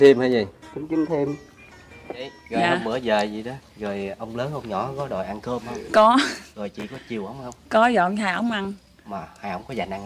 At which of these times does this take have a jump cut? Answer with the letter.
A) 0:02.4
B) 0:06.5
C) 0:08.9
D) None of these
A